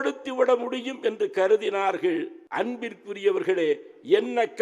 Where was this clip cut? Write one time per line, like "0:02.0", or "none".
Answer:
0:02.4